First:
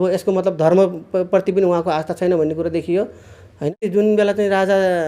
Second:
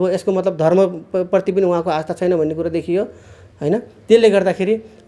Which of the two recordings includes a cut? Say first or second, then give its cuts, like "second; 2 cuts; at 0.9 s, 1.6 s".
first; 1 cut; at 3.8 s